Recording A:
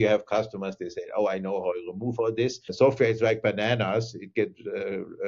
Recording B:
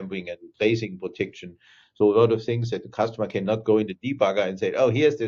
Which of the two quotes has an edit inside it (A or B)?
A